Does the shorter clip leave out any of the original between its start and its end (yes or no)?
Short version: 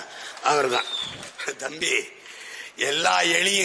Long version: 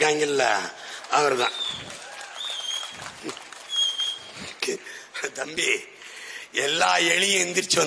yes